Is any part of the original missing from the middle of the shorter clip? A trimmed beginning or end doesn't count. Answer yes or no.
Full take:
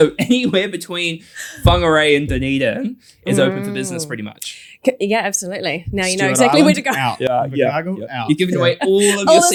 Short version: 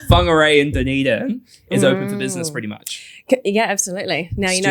no